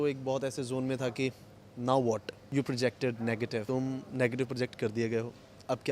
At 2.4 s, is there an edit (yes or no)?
yes